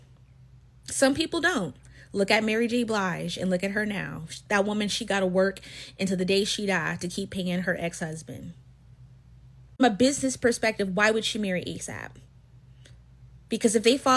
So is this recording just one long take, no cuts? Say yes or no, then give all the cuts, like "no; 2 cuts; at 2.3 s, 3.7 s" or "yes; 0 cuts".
no; 1 cut; at 7.4 s